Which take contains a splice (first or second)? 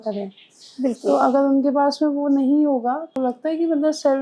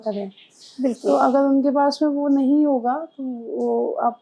first